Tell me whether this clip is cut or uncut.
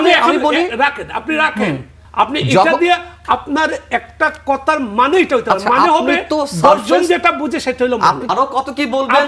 cut